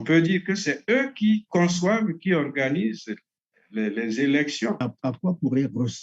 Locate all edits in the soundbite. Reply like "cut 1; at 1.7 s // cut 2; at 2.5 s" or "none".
cut 1; at 4.8 s